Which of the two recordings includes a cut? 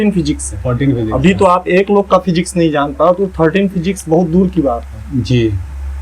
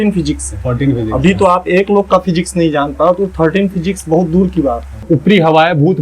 second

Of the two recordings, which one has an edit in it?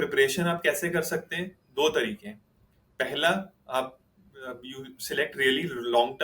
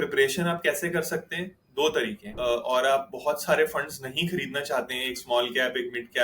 second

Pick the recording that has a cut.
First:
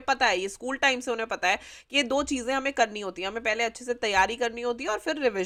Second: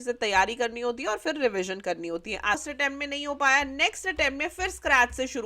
second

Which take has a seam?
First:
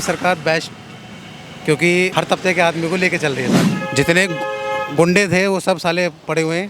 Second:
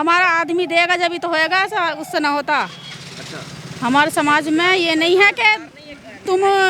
first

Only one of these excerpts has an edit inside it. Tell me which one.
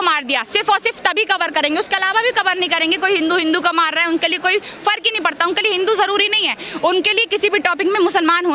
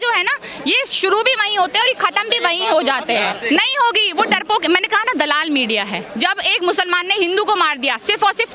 second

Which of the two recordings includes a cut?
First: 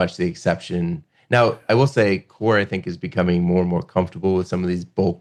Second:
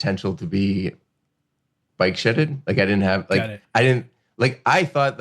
second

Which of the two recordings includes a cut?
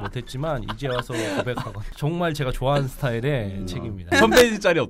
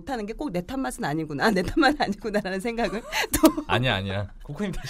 first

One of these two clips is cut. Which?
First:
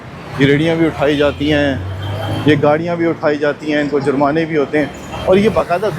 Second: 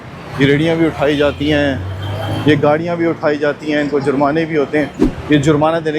second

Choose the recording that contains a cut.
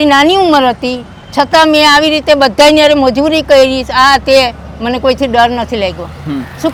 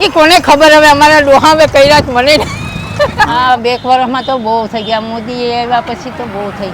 second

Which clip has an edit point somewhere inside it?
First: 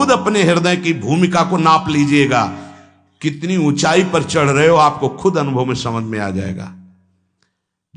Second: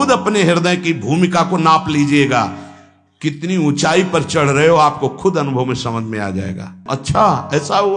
second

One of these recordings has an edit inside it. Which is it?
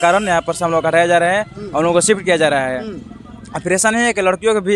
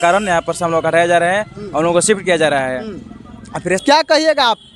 second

